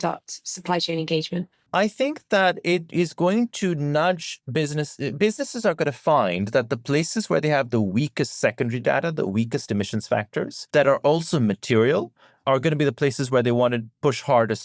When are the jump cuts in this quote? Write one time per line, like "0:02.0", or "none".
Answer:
0:10.6